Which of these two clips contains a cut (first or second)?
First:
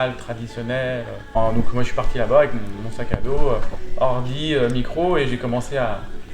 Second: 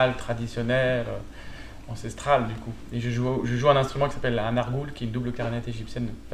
first